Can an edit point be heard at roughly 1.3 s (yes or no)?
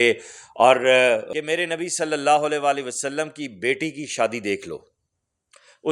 yes